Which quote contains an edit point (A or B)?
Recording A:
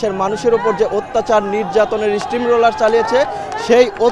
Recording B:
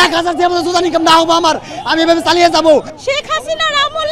B